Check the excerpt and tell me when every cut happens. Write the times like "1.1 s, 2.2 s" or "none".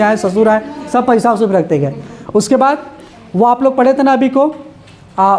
none